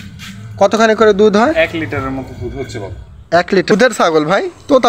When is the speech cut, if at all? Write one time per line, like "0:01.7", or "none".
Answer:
0:03.7